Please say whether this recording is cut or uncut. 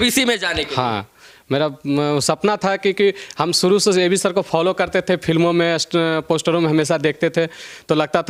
uncut